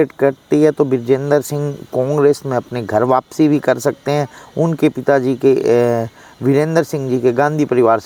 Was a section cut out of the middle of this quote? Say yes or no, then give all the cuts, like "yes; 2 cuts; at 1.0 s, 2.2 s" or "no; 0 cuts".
no; 0 cuts